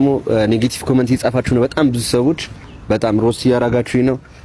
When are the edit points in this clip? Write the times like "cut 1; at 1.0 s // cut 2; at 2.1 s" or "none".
none